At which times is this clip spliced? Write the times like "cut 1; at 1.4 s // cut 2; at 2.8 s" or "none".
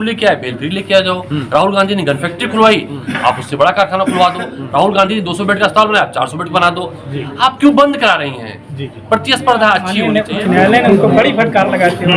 cut 1; at 9.9 s